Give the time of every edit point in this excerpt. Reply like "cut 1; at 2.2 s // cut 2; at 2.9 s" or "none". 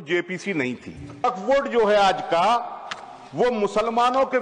cut 1; at 1.2 s